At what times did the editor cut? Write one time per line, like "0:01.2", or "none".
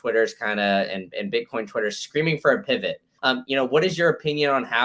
0:03.1